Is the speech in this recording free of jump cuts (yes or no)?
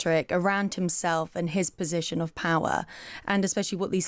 yes